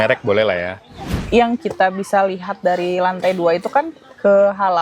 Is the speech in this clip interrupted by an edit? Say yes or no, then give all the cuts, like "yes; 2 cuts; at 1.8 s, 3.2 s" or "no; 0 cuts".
yes; 1 cut; at 1.2 s